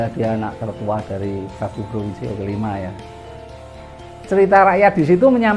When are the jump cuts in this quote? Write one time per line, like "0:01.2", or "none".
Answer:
0:03.6

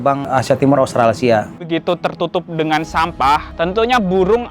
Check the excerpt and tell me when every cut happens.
0:01.6

